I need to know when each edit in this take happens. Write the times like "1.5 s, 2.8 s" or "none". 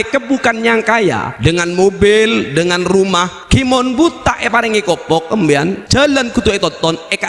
1.3 s, 3.4 s, 5.8 s